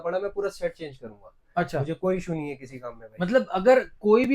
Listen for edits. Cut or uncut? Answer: uncut